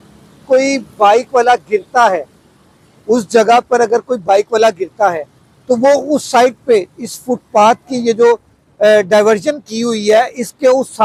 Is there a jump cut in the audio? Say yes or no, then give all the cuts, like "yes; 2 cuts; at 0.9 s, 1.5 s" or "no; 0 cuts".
no; 0 cuts